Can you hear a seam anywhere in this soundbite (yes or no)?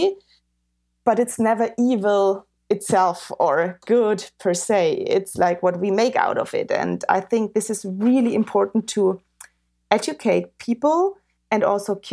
no